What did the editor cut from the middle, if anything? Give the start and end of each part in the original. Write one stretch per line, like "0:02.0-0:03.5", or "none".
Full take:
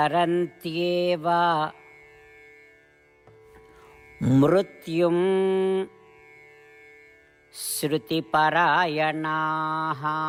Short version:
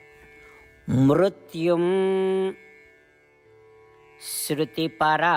none